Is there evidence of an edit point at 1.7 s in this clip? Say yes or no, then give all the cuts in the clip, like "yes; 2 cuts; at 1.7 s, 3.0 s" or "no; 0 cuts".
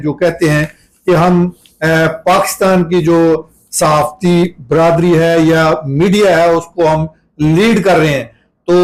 no; 0 cuts